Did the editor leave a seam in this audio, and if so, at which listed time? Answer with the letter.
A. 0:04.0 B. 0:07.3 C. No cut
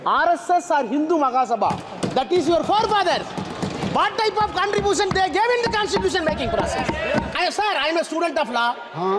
B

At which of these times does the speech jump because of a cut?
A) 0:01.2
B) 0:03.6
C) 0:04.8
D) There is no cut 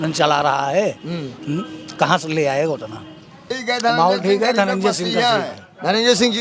B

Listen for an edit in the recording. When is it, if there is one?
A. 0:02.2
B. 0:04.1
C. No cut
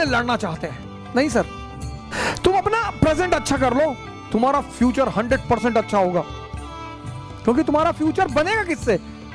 A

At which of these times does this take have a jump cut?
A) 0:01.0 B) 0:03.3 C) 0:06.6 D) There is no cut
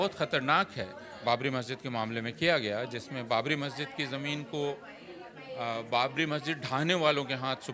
A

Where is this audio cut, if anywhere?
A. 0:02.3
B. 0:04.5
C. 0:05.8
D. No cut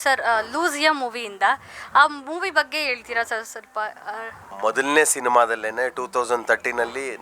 B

